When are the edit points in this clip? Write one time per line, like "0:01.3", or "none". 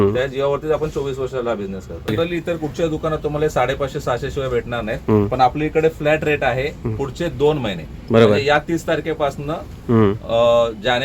0:02.2